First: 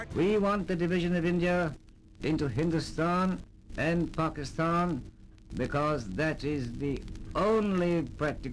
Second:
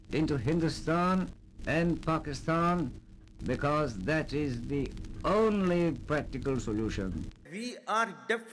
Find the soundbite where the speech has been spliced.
second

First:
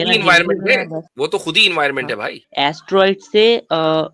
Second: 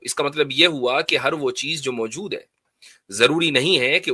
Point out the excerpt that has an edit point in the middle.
first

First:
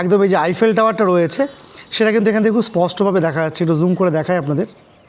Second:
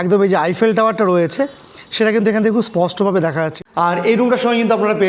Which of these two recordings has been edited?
second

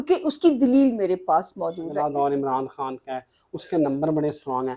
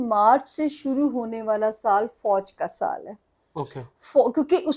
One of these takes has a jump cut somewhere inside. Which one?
first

